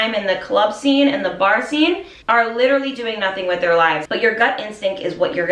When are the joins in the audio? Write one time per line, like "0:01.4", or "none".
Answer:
0:02.1
0:04.0